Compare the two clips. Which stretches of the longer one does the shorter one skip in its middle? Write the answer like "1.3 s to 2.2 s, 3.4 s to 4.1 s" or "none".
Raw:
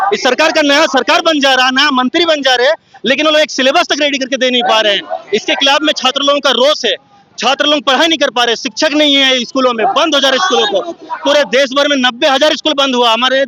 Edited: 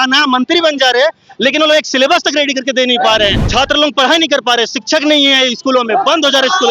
5.1 s to 7.3 s